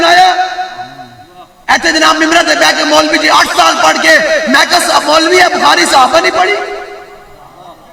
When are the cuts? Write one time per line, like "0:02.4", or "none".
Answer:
none